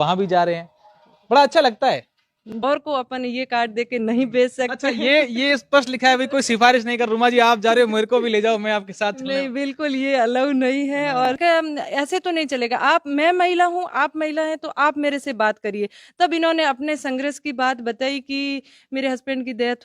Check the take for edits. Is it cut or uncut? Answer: cut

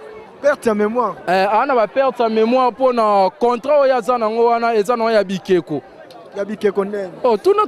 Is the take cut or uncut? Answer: uncut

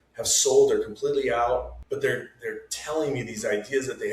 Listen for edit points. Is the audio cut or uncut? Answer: cut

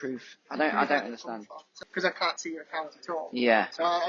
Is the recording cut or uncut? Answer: cut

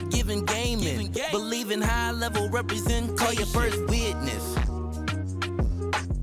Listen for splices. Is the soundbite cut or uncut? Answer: uncut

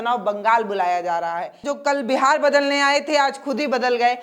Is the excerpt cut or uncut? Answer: cut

